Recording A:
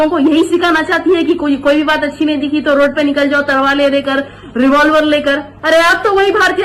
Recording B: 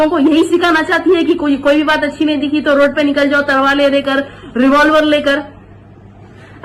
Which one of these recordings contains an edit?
A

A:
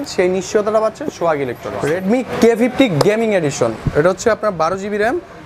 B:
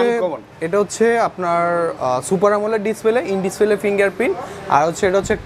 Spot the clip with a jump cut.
A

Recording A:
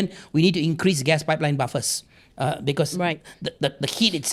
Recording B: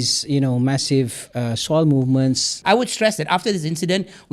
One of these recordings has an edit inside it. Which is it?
B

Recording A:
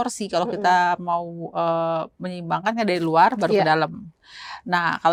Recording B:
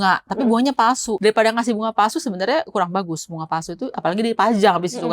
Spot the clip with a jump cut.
B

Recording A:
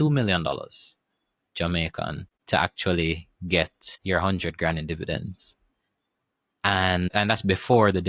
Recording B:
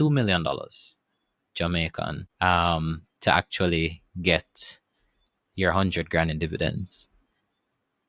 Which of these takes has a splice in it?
A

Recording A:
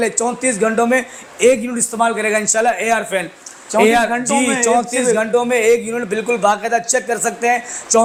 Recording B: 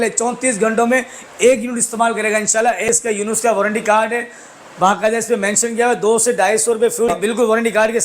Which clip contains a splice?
B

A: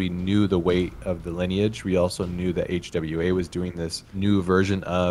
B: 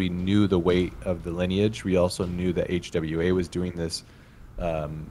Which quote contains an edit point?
A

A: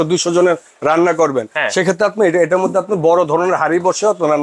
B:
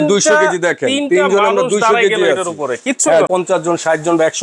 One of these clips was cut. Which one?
B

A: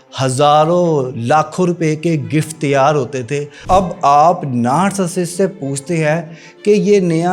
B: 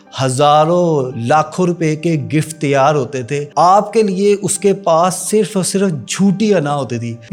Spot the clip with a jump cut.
A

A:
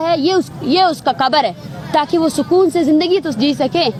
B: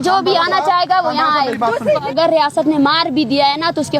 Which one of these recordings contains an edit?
B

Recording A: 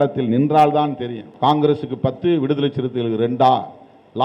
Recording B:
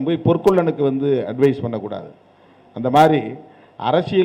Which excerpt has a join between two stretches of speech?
A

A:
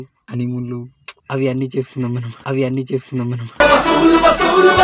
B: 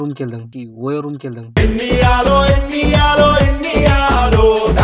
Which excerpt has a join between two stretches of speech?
A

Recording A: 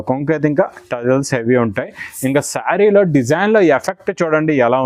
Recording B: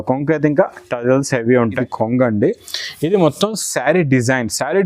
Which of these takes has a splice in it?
B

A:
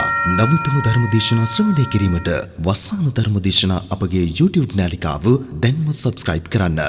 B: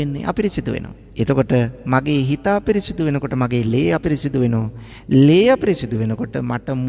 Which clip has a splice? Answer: B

